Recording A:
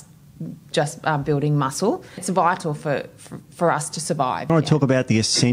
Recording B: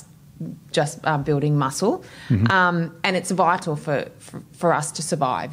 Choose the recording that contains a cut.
A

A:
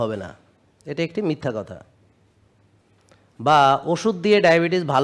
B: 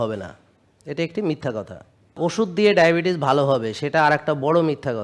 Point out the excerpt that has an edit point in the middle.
B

